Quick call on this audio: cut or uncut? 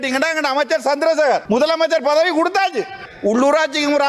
cut